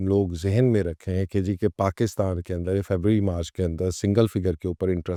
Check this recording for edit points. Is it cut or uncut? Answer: uncut